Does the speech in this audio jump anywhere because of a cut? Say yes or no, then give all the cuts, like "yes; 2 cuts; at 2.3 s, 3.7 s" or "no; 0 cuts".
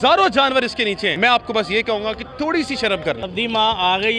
yes; 2 cuts; at 1.1 s, 3.2 s